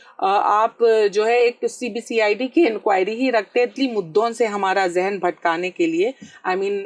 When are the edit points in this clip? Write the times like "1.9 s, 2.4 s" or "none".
3.7 s